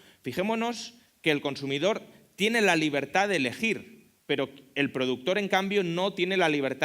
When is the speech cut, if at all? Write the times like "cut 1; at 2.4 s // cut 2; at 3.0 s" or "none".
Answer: cut 1; at 3.3 s